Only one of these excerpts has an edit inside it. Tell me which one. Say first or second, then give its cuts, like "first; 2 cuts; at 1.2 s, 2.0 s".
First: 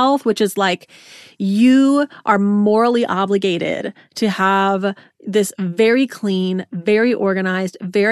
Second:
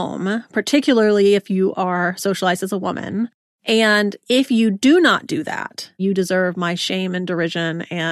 second; 2 cuts; at 3.8 s, 6.0 s